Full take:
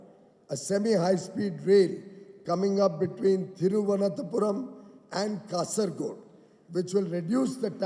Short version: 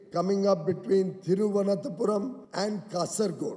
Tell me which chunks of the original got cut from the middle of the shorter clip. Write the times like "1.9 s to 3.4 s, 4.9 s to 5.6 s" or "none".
4.7 s to 5.0 s